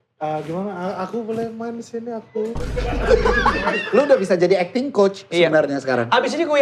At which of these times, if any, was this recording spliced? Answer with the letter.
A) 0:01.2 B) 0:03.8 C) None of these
B